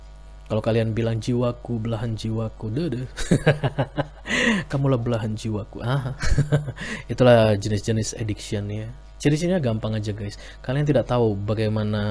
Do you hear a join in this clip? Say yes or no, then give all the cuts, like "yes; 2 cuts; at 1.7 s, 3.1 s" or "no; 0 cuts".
no; 0 cuts